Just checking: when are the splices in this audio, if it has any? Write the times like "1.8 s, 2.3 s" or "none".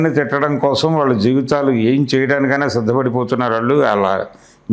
none